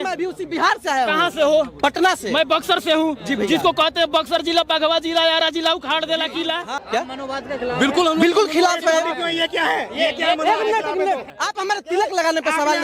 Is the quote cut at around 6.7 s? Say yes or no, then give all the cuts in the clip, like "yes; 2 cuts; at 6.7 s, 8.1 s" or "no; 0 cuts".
yes; 2 cuts; at 6.7 s, 11.3 s